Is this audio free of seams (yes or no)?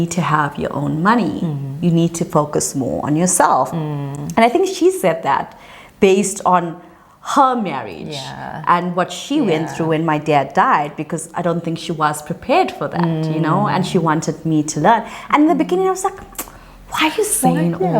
yes